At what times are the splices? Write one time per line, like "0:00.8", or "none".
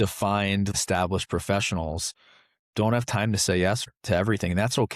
0:00.7
0:03.9